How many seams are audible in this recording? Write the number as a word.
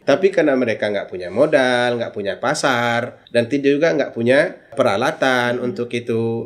two